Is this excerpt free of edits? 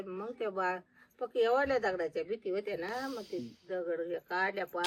yes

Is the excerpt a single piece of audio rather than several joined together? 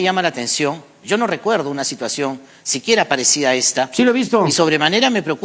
yes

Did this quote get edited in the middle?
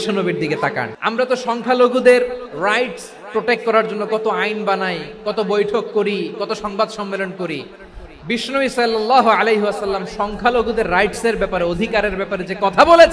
yes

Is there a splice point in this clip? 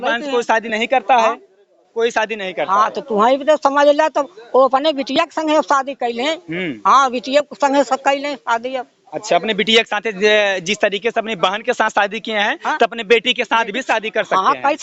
no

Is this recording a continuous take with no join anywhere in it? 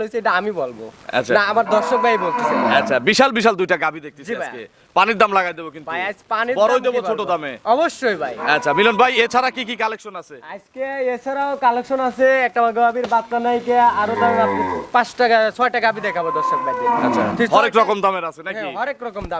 yes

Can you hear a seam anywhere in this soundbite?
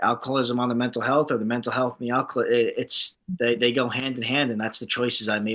no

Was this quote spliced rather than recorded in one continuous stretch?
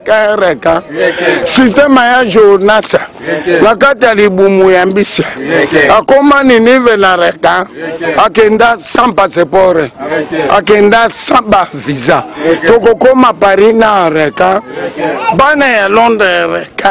no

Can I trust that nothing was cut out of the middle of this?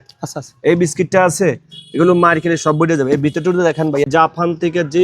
no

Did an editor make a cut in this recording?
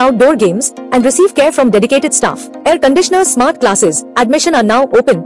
no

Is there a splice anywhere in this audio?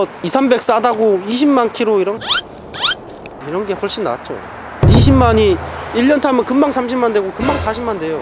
no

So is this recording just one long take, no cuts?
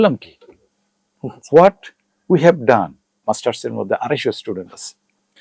no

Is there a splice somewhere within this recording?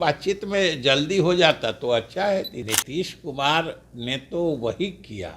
yes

